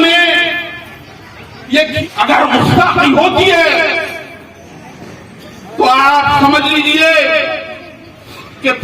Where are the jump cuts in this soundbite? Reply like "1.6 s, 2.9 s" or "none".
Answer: 1.9 s